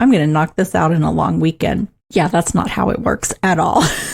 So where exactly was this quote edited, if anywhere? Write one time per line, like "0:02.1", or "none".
0:02.0